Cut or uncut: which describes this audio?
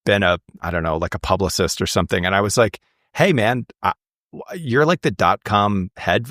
uncut